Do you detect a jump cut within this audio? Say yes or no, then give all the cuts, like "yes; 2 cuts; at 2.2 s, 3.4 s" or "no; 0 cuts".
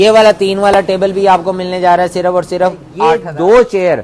yes; 1 cut; at 2.9 s